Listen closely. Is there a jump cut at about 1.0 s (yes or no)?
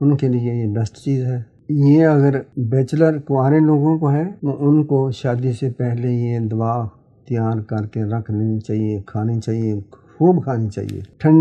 no